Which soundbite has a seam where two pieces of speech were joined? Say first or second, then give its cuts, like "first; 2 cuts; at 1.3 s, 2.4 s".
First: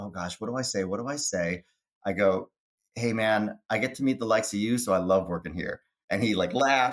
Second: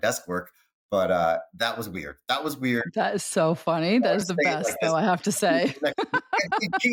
first; 1 cut; at 1.8 s